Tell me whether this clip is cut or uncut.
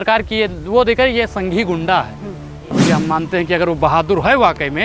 cut